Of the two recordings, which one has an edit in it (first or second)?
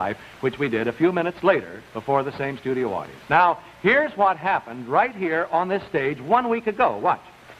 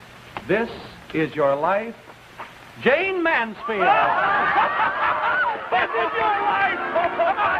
first